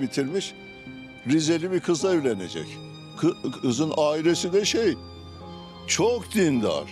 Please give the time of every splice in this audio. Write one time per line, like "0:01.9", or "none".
none